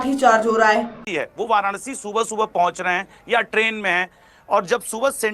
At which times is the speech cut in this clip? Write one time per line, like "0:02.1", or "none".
0:01.0